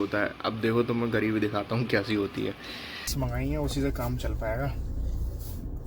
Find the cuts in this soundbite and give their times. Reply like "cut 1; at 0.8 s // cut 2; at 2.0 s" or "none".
cut 1; at 3.1 s